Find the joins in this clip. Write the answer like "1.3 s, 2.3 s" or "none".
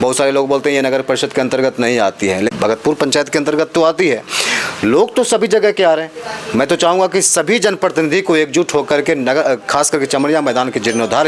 2.5 s